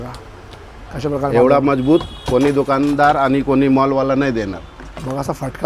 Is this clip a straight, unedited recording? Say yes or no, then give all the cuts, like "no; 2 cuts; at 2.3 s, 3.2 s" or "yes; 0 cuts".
yes; 0 cuts